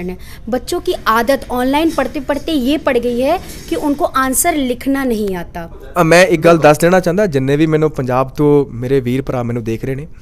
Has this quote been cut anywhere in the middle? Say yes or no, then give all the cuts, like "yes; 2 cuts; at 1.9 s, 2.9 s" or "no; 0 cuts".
yes; 1 cut; at 5.8 s